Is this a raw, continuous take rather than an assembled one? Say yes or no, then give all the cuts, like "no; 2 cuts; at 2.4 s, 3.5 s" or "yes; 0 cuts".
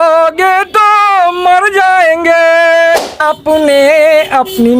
no; 1 cut; at 3.2 s